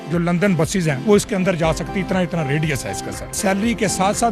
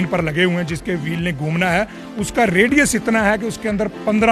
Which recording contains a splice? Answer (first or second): first